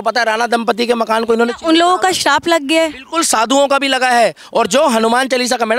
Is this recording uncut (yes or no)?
yes